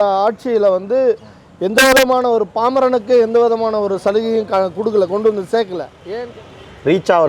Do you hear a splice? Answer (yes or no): yes